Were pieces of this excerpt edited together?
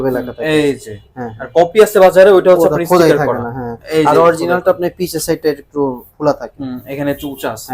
no; 0 cuts

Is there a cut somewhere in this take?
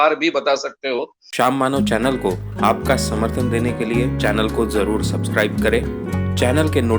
yes; 1 cut; at 1.2 s

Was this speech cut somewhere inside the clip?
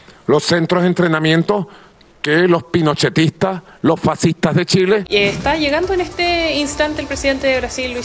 yes; 1 cut; at 5.1 s

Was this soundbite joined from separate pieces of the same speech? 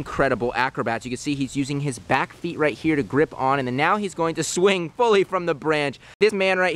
no; 0 cuts

